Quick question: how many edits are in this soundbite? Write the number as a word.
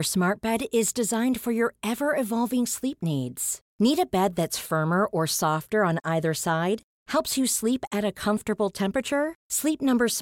zero